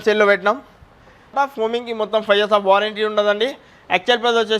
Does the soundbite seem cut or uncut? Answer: cut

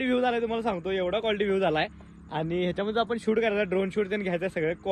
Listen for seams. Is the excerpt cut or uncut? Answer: uncut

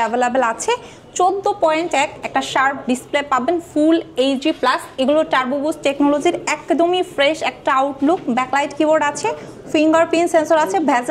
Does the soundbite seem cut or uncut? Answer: uncut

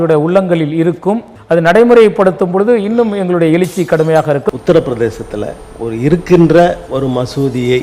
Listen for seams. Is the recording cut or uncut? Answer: cut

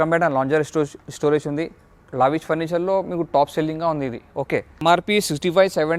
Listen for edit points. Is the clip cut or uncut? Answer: cut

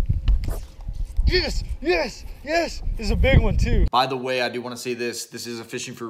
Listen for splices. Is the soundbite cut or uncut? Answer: cut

